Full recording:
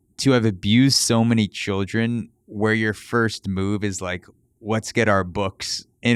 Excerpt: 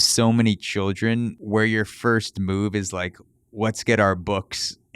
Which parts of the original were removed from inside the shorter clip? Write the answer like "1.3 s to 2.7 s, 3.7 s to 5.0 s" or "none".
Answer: 2.3 s to 2.5 s